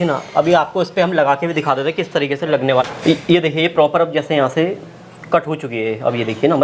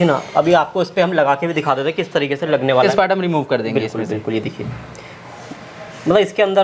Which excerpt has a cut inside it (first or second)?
second